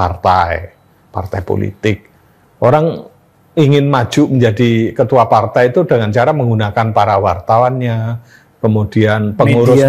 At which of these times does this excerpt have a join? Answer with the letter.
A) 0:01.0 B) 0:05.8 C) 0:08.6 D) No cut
D